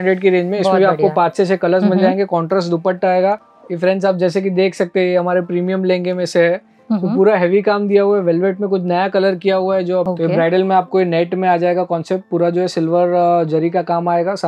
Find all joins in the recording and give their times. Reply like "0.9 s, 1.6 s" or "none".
3.5 s, 10.1 s